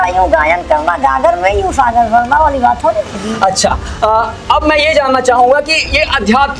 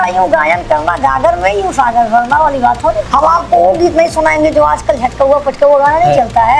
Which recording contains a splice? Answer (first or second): second